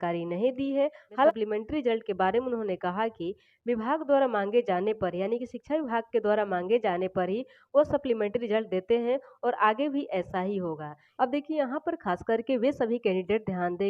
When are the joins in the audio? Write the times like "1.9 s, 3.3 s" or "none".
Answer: 1.3 s, 11.0 s